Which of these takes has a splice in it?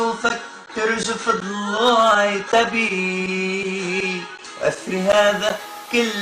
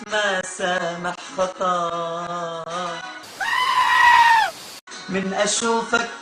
second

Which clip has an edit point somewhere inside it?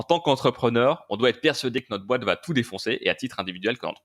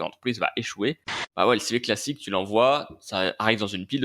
second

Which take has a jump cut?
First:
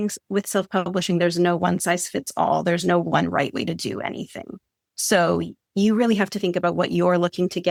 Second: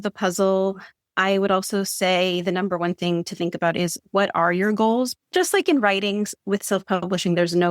second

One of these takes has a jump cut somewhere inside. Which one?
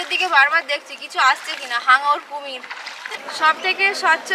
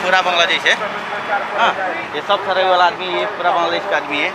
first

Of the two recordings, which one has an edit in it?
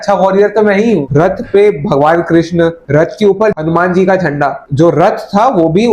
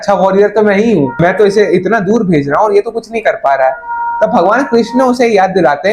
first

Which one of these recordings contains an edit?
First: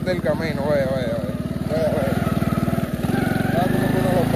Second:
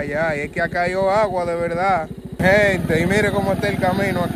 second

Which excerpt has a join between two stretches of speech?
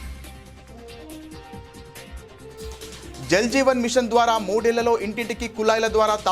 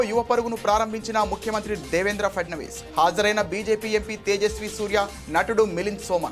first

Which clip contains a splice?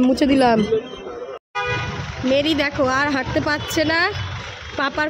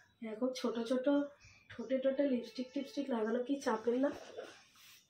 first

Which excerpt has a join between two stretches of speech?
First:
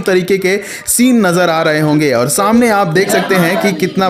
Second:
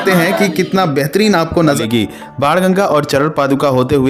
second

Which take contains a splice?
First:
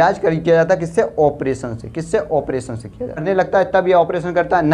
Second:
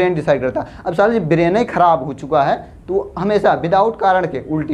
first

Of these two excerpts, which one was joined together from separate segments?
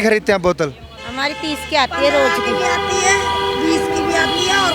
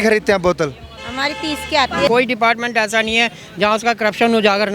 second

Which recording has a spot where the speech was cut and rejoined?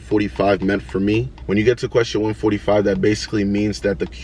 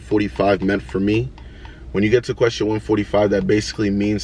first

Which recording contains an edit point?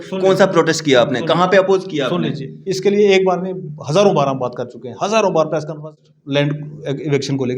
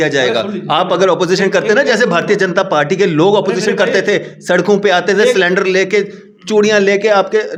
first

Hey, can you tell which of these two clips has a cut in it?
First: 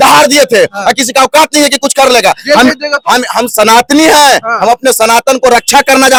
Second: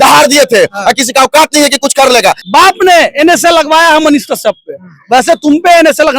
second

